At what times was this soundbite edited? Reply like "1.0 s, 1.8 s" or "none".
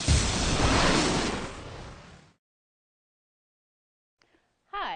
none